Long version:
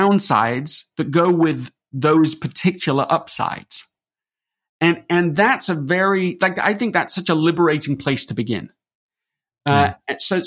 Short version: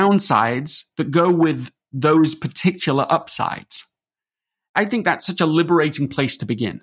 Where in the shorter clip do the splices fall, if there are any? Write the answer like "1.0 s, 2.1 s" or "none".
4.7 s